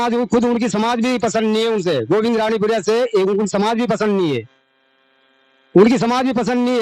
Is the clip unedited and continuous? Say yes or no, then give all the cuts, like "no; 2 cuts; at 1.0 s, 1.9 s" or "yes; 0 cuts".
yes; 0 cuts